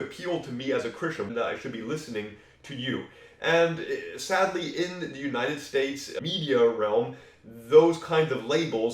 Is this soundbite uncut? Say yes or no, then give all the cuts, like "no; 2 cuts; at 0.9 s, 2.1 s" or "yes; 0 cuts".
no; 2 cuts; at 1.3 s, 6.1 s